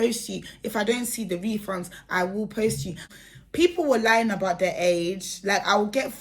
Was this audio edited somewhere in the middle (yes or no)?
yes